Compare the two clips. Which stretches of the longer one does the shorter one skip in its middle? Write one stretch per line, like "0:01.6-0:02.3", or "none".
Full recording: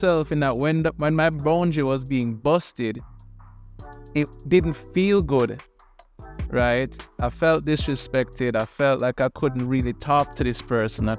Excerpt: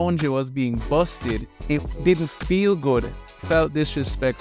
0:03.1-0:04.0
0:05.9-0:07.3